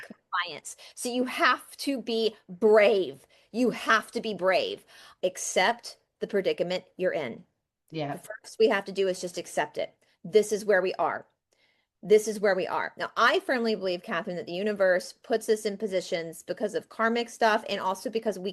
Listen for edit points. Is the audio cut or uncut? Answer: cut